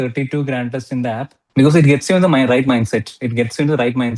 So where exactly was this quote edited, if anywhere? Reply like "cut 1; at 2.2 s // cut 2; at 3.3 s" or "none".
cut 1; at 1.4 s